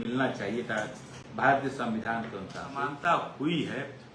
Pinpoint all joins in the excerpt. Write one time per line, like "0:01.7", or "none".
0:02.9

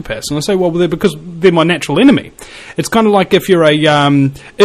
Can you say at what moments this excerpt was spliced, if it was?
0:03.6

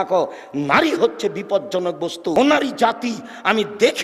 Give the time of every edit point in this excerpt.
0:02.3

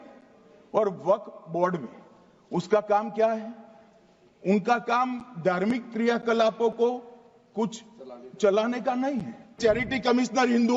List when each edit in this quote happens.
0:09.5

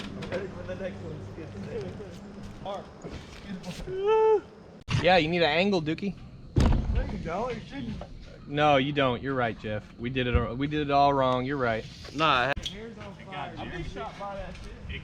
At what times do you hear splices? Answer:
0:02.7
0:05.0
0:12.5

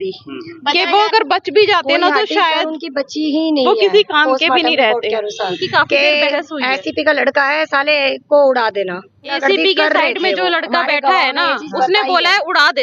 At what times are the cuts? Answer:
0:05.6
0:09.4

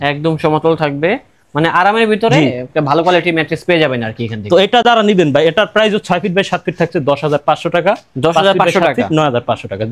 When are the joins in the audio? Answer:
none

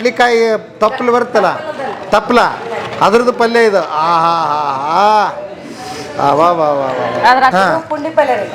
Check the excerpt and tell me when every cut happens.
0:07.5

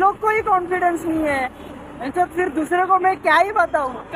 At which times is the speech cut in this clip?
none

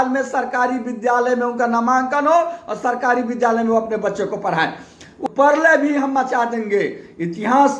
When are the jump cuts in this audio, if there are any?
0:05.2

